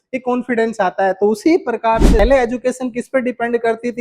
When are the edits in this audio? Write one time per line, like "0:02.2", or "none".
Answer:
0:02.2